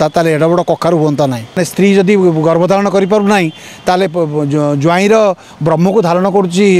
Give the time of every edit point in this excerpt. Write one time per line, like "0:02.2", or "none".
0:01.6